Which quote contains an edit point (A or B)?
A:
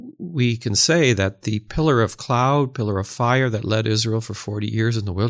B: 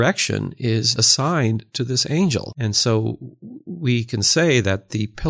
B